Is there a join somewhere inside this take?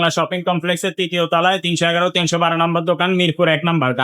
no; 0 cuts

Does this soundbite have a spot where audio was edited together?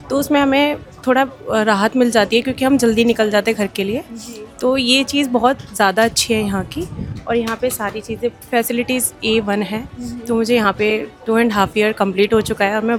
no; 0 cuts

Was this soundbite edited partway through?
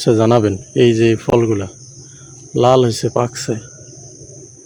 no; 0 cuts

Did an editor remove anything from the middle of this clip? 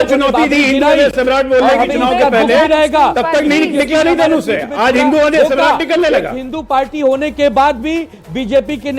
yes; 1 cut; at 1.1 s

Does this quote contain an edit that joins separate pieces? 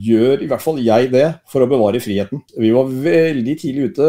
yes; 1 cut; at 2.4 s

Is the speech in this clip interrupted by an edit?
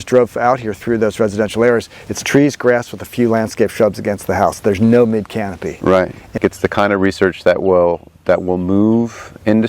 yes; 1 cut; at 6.4 s

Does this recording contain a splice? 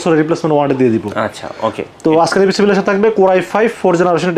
no; 0 cuts

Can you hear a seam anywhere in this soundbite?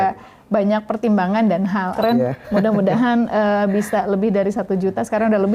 yes; 1 cut; at 1.9 s

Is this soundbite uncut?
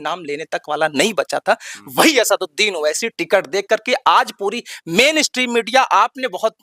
yes; 0 cuts

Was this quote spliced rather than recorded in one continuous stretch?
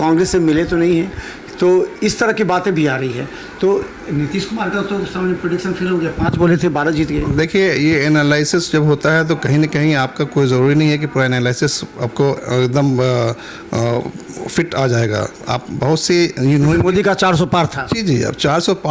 no; 0 cuts

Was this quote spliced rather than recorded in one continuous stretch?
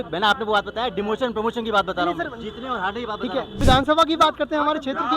yes; 1 cut; at 3.6 s

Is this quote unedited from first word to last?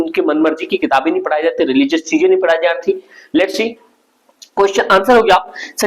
yes; 0 cuts

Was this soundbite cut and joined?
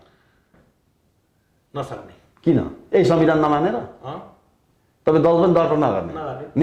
no; 0 cuts

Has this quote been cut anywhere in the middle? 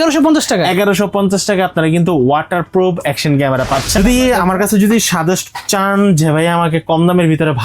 yes; 1 cut; at 4.0 s

